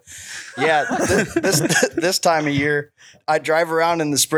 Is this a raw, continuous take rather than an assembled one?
no; 1 cut; at 3.2 s

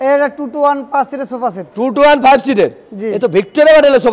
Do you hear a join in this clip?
no; 0 cuts

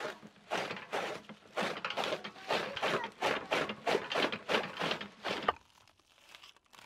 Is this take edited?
yes; 1 cut; at 5.5 s

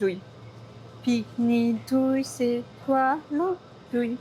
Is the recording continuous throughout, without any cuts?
yes; 0 cuts

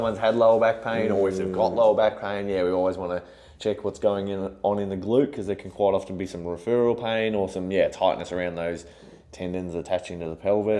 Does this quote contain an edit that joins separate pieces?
no; 0 cuts

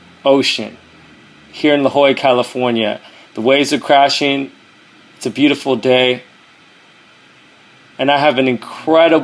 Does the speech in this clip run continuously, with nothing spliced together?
yes; 0 cuts

